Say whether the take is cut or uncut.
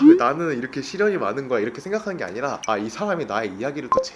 uncut